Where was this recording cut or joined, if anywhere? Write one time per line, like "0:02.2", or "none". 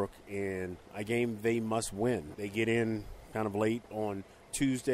0:00.9
0:02.3
0:03.9